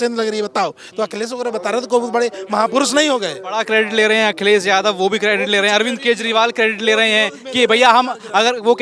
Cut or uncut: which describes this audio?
uncut